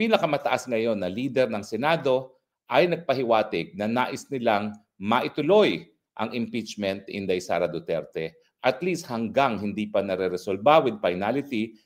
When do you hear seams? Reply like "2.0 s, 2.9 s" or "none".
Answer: none

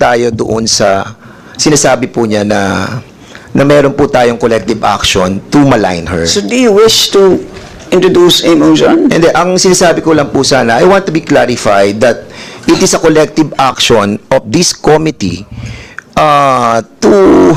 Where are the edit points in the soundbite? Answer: none

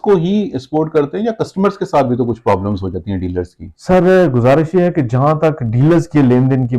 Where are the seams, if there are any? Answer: none

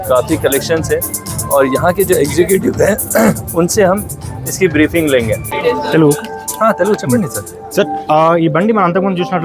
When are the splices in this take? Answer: 5.5 s

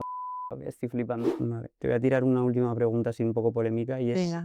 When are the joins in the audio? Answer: 1.3 s

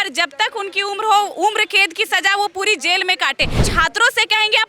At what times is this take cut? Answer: 3.7 s

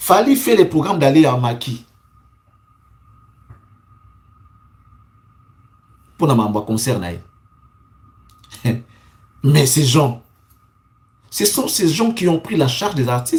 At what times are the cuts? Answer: none

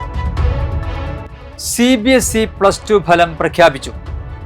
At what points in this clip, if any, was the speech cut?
1.4 s

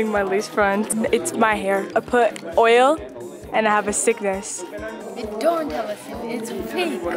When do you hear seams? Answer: 0.9 s, 1.9 s

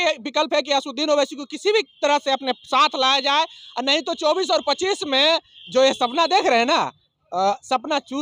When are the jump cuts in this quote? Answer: none

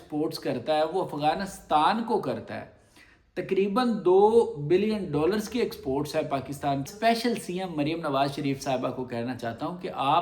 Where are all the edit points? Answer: 6.9 s

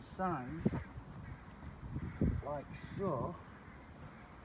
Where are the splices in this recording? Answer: none

